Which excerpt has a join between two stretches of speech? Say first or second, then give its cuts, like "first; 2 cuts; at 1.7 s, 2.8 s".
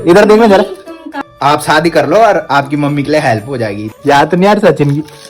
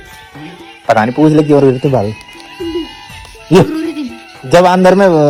first; 2 cuts; at 1.3 s, 3.9 s